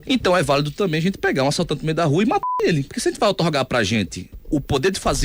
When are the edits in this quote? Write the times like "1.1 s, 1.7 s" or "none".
none